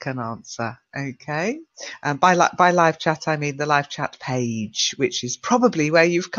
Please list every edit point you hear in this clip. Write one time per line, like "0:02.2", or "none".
none